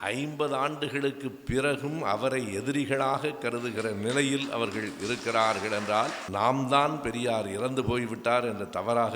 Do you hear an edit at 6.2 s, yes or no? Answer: yes